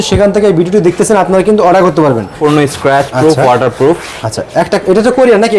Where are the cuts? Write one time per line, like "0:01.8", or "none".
0:02.4